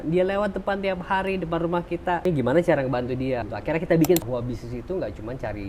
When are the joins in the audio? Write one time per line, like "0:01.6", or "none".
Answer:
0:02.2
0:03.5
0:04.2